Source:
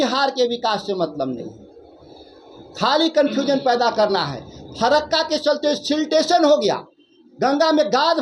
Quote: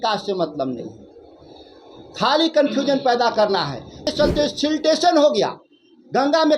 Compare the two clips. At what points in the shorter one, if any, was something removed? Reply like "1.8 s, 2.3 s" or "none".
4.1 s